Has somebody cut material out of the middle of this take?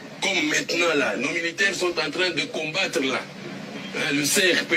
no; 0 cuts

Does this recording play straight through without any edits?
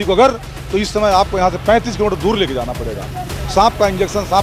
yes; 0 cuts

